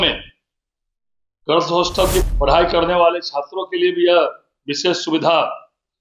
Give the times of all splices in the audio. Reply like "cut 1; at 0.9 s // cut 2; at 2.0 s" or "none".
cut 1; at 2.2 s